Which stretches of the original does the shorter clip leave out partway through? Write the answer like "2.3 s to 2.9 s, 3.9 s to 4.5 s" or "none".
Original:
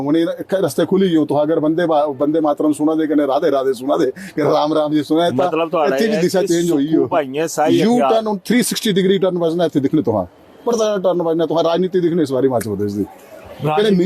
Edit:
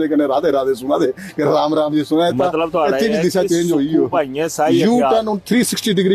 none